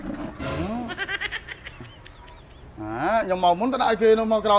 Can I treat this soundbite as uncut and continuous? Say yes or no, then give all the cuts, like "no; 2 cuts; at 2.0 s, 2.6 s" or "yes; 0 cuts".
no; 1 cut; at 2.6 s